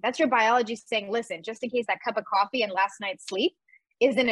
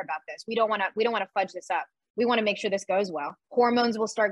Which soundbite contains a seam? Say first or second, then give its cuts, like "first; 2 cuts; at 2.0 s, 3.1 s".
second; 1 cut; at 3.4 s